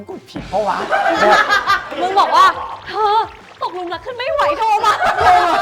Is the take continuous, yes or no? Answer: no